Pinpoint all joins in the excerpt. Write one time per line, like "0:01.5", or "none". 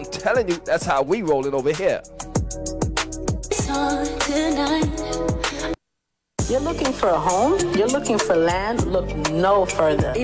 0:05.9